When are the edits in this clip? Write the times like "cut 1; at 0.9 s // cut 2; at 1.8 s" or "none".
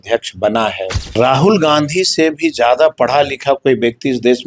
cut 1; at 1.0 s